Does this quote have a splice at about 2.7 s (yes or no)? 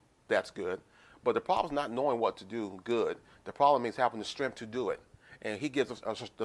no